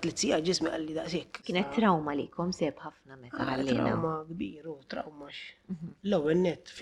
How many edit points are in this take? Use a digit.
1